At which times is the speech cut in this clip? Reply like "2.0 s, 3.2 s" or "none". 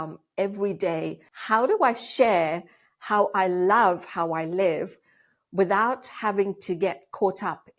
1.3 s